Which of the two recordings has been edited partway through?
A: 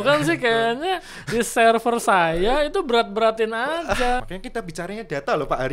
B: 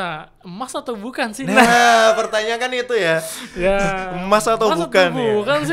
A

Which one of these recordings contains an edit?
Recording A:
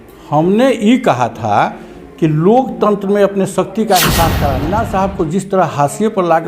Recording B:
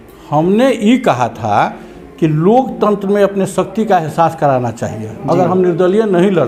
A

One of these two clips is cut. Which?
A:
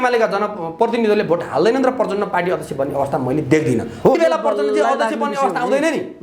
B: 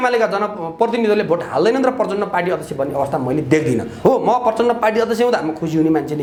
A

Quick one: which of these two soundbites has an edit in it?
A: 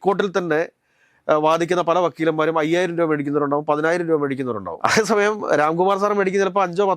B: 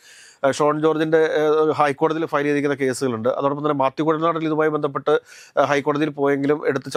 A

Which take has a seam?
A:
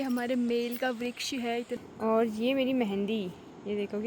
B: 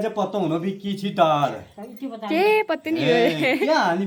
A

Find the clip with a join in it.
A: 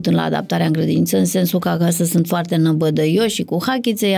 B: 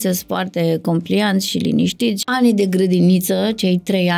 B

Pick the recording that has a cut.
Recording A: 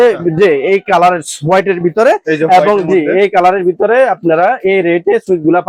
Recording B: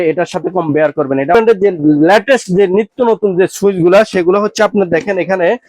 B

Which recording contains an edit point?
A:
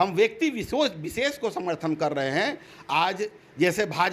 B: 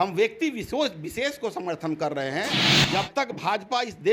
B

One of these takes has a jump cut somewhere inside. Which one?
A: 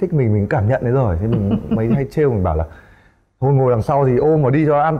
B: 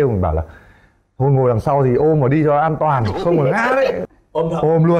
B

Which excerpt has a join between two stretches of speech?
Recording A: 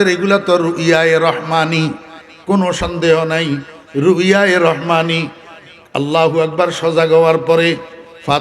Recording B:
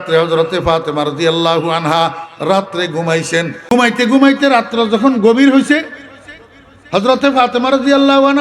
B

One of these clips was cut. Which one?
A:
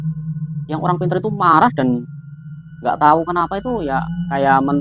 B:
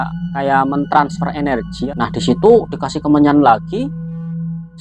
B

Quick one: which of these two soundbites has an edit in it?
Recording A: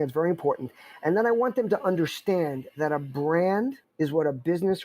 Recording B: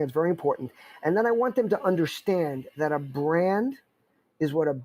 A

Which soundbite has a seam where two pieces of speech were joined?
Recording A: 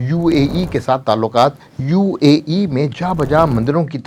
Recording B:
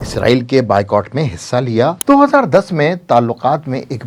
B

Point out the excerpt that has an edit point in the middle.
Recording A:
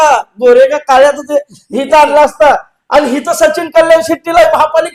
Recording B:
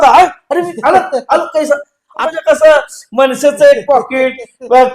B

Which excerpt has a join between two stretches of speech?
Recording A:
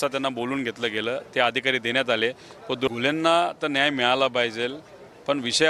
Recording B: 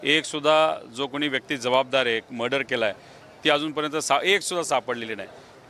A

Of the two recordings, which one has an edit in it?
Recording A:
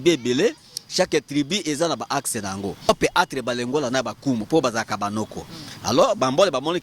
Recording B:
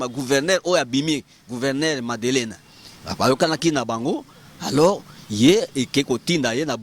A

